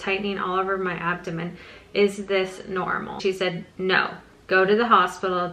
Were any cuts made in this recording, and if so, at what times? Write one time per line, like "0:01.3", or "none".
0:03.2